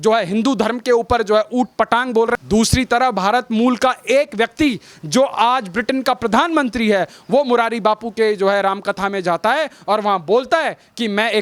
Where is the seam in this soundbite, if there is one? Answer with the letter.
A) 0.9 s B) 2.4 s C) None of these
B